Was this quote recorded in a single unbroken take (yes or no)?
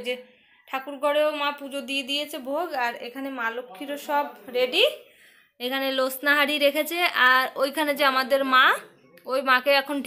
yes